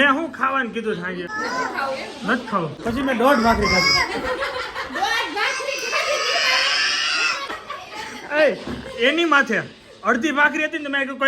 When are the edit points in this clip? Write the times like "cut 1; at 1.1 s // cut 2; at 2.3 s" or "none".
cut 1; at 1.3 s // cut 2; at 2.8 s // cut 3; at 7.5 s